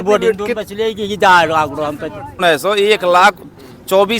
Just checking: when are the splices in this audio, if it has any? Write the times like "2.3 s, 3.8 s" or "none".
2.4 s